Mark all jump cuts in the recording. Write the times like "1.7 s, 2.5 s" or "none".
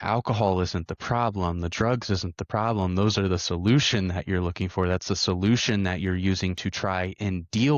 none